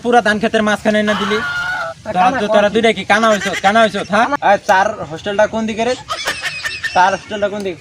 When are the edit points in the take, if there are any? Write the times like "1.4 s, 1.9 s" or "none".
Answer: 4.3 s